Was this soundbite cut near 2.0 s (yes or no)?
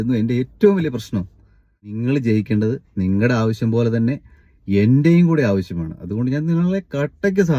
yes